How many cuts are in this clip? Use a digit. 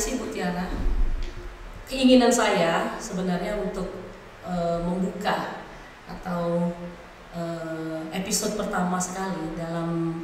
0